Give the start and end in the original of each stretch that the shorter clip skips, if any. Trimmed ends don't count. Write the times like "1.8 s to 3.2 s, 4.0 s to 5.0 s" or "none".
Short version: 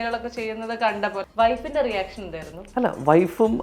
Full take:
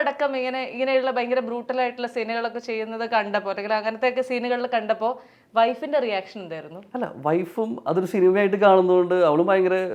3.5 s to 5.4 s

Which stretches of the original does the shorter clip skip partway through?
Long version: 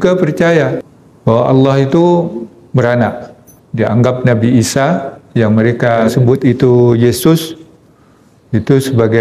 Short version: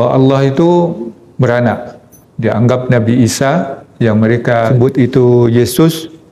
6.0 s to 6.1 s

